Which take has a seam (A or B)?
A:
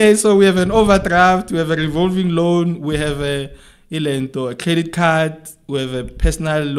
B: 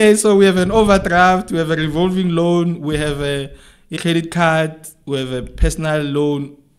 B